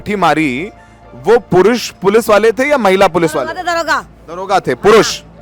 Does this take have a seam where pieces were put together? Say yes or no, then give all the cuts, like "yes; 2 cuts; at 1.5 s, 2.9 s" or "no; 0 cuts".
no; 0 cuts